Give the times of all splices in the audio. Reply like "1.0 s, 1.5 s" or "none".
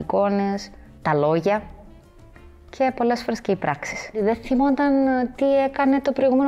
4.2 s